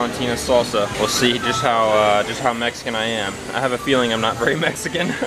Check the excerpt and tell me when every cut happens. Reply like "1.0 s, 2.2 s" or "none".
0.9 s